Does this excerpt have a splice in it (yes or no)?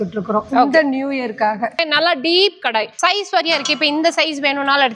yes